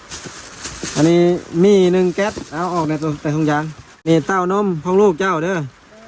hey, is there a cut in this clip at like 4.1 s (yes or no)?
yes